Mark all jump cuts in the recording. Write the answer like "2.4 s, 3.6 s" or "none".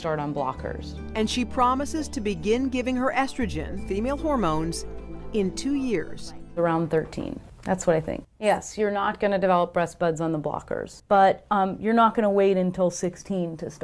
none

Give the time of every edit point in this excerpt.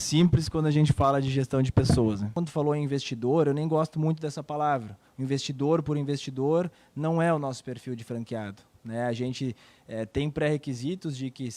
2.3 s

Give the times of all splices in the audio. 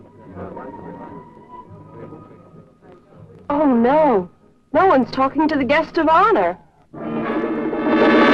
none

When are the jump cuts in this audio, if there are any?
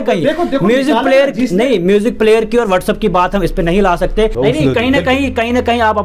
4.3 s

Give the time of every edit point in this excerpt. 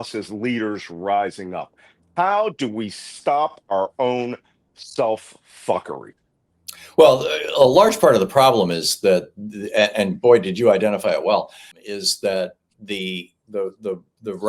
11.8 s

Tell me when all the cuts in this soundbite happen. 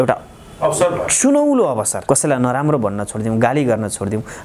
1.9 s

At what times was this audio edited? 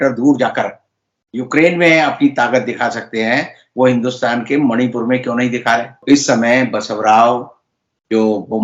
5.9 s

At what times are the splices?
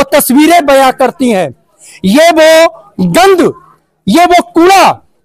none

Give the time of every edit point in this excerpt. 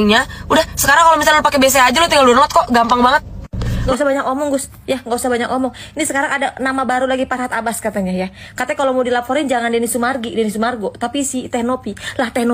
3.7 s

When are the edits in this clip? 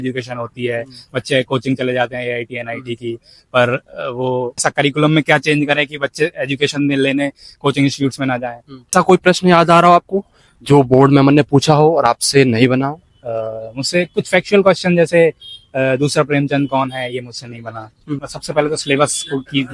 4.6 s, 8.7 s, 18.3 s

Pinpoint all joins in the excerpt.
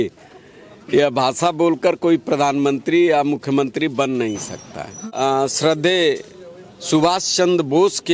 5.0 s

